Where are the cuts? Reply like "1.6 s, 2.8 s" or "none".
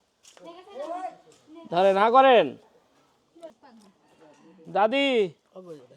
3.5 s